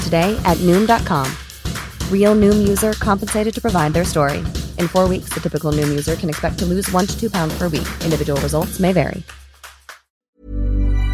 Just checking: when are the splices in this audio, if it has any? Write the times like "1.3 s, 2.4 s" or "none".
10.2 s